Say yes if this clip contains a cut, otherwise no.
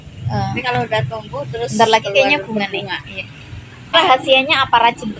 yes